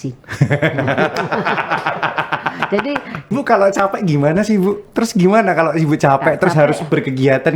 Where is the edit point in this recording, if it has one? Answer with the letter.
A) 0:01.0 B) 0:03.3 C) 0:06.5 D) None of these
B